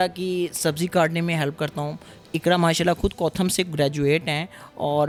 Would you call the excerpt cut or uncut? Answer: uncut